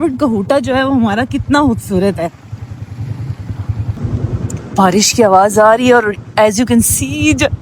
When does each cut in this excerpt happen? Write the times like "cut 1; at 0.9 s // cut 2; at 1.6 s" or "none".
none